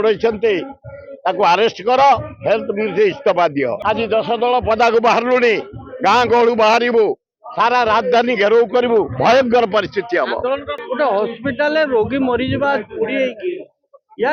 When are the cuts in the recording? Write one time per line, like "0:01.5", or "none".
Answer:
0:03.8
0:10.7

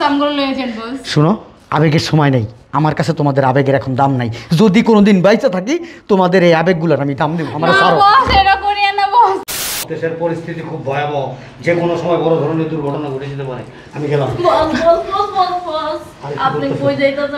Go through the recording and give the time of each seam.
0:09.5

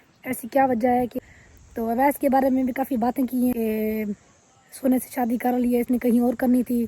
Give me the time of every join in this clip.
0:01.2
0:03.5

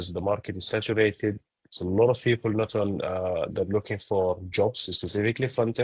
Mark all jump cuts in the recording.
none

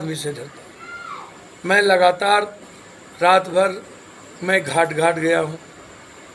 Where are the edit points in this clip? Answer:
none

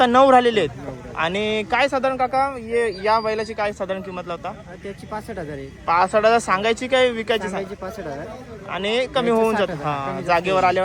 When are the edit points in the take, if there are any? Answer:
none

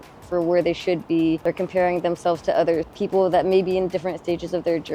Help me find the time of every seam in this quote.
0:01.4
0:02.9

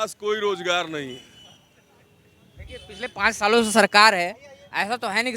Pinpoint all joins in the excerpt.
none

